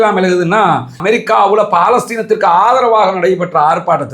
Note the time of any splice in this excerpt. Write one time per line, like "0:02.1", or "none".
0:01.0